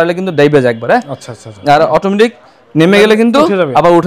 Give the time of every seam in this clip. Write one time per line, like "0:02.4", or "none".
none